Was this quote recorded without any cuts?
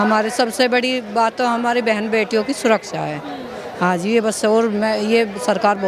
yes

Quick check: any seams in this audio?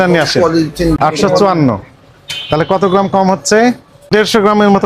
yes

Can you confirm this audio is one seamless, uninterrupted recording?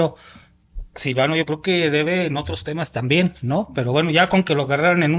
yes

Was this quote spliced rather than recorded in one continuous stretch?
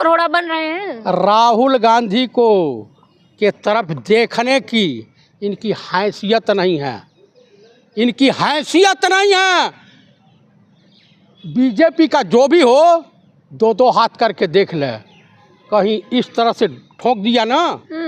no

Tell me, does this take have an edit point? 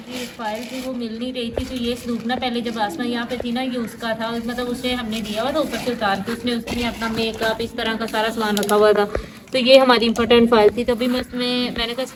no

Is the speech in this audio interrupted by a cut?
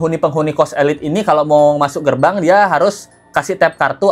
no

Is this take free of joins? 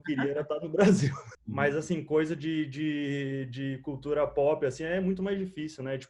no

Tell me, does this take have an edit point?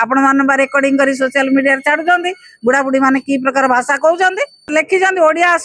yes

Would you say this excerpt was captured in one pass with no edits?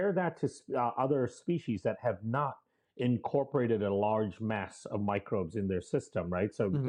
yes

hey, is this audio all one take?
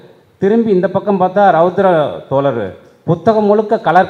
yes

